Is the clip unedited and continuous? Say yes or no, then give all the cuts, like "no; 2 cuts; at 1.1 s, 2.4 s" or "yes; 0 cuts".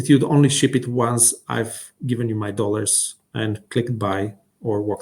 yes; 0 cuts